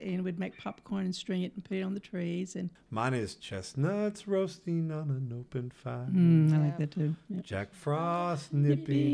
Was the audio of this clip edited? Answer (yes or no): yes